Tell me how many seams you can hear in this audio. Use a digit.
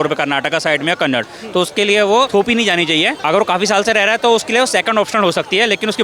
2